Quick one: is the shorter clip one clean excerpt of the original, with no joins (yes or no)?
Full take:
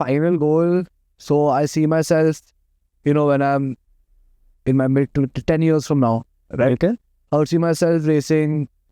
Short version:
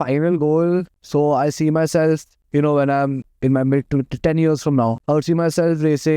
no